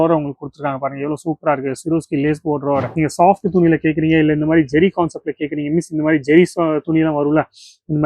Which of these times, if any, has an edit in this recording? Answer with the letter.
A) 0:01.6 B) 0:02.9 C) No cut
B